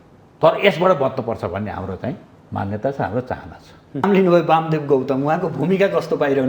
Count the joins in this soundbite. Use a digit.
1